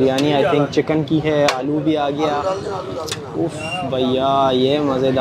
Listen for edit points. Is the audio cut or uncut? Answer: uncut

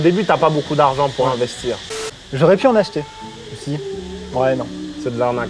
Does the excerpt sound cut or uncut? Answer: cut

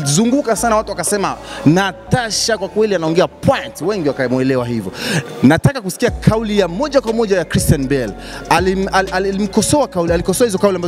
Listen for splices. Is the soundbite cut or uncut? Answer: uncut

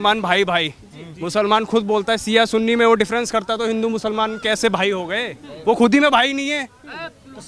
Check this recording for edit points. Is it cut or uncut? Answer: uncut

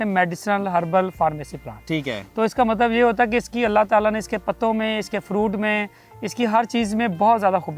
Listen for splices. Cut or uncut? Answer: uncut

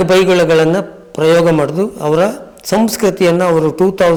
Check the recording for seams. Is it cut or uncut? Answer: uncut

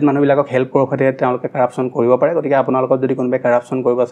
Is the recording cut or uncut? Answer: uncut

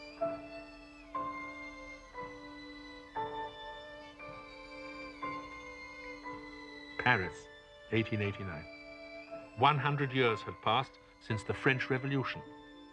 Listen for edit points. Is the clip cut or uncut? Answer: uncut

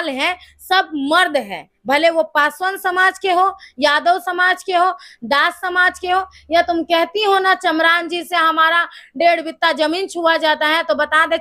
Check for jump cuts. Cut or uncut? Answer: uncut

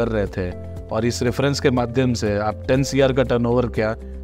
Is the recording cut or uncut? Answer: uncut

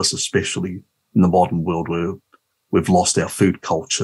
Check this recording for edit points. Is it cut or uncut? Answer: uncut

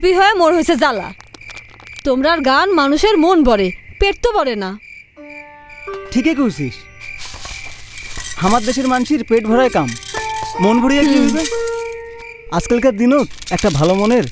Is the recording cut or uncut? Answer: cut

